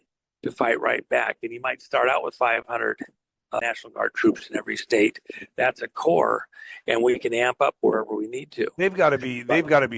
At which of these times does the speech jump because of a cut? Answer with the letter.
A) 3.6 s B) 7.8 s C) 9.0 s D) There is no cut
A